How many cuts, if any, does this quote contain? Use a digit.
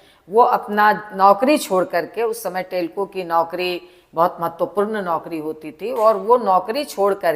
0